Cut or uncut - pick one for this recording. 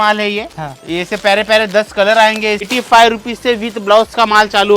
cut